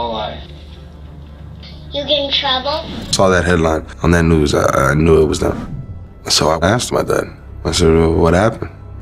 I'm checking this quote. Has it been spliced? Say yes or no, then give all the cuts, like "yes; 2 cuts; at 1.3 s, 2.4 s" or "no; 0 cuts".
yes; 1 cut; at 3.1 s